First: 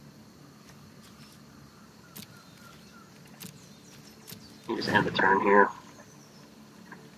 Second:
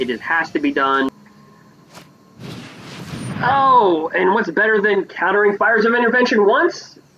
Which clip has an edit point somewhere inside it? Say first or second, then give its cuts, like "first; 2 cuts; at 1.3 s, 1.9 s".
second; 1 cut; at 1.1 s